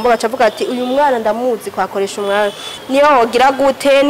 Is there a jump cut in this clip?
yes; 1 cut; at 2.7 s

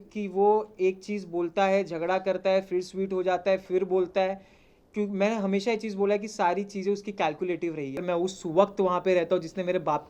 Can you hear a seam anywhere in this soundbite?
yes; 1 cut; at 8.0 s

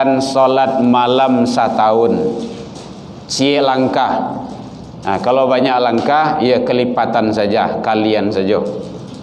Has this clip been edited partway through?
no; 0 cuts

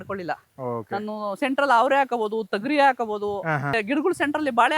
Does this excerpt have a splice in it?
yes; 1 cut; at 3.8 s

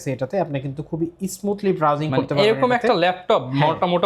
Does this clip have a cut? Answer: no; 0 cuts

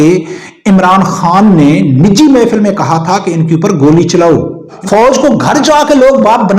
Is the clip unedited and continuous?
no; 1 cut; at 4.8 s

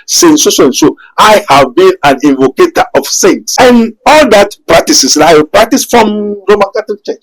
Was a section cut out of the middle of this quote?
yes; 1 cut; at 3.5 s

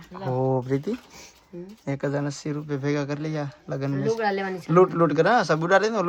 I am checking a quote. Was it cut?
no; 0 cuts

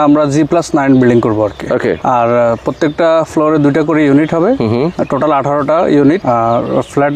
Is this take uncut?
no; 3 cuts; at 2.0 s, 5.0 s, 6.2 s

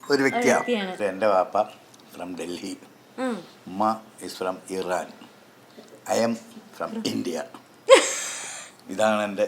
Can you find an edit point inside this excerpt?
yes; 1 cut; at 0.9 s

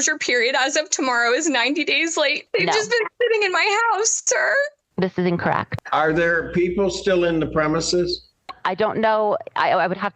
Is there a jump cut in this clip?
yes; 2 cuts; at 2.4 s, 5.7 s

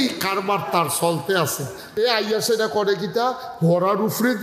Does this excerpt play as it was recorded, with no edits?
no; 1 cut; at 1.8 s

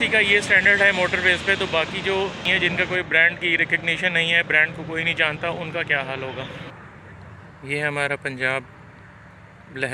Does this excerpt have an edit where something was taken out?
yes; 2 cuts; at 2.5 s, 6.7 s

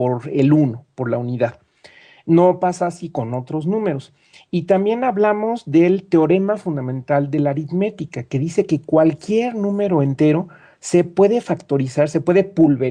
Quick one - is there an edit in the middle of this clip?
no; 0 cuts

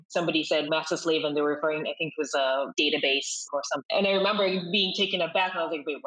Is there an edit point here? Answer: yes; 1 cut; at 3.8 s

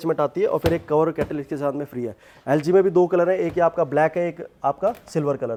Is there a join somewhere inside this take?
no; 0 cuts

